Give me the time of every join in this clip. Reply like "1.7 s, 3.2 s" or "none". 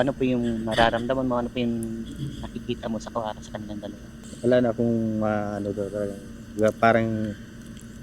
4.2 s